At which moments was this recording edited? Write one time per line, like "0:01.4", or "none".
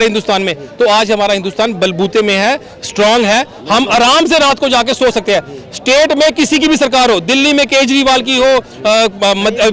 none